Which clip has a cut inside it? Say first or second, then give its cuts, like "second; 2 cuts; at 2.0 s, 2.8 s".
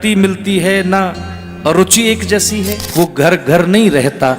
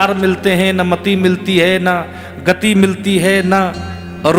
first; 1 cut; at 2.8 s